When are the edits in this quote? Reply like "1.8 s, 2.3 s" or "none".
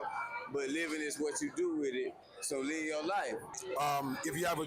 3.5 s